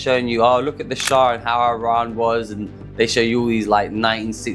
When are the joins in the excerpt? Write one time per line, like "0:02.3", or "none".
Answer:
none